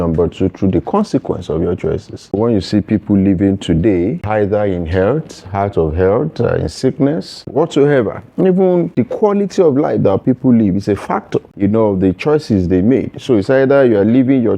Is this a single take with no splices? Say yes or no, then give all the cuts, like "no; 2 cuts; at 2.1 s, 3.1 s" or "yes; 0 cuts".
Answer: no; 5 cuts; at 2.3 s, 4.2 s, 7.5 s, 8.9 s, 11.5 s